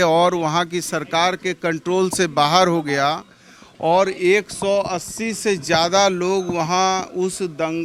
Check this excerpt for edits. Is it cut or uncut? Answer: uncut